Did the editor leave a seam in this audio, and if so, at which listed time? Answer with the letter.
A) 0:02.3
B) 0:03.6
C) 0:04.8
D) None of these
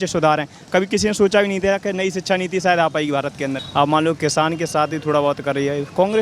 B